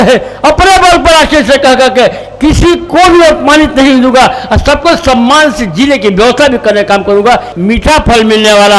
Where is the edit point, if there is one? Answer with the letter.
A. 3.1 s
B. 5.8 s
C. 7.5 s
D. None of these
C